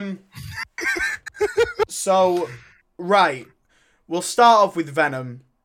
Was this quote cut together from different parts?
yes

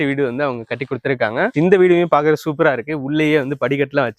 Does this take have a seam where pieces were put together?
no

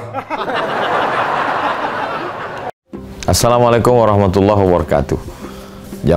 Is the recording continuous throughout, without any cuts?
no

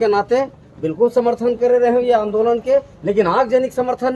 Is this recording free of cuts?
yes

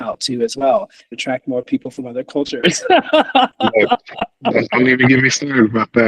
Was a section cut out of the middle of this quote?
yes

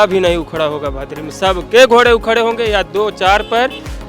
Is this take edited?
no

